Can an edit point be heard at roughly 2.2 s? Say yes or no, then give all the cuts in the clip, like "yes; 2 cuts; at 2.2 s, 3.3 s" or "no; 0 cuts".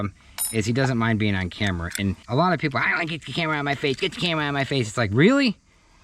yes; 1 cut; at 2.2 s